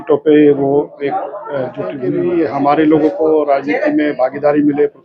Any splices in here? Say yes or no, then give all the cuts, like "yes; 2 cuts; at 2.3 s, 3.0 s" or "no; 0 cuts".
yes; 1 cut; at 2.0 s